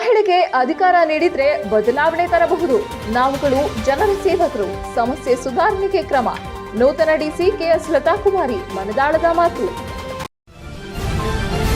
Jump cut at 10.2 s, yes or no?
yes